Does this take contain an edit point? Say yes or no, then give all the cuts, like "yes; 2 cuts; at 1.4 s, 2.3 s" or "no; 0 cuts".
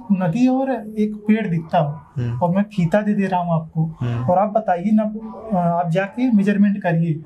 no; 0 cuts